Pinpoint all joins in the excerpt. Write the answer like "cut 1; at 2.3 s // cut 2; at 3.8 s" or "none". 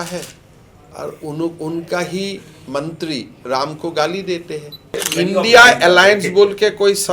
cut 1; at 5.1 s